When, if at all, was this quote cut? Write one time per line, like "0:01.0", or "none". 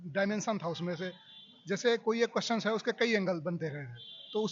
none